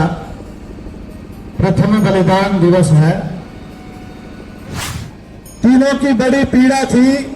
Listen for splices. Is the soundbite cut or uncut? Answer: cut